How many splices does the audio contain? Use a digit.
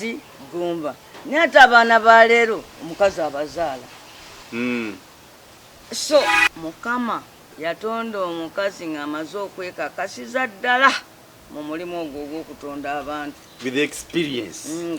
2